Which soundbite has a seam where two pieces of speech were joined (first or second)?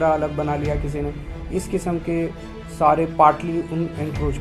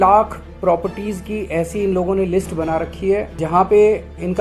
second